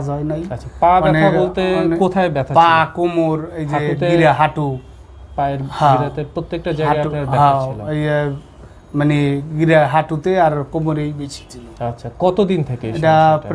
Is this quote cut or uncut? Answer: uncut